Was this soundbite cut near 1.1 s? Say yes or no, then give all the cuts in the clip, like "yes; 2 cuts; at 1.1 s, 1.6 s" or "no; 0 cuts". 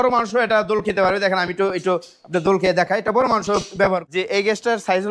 no; 1 cut; at 4.0 s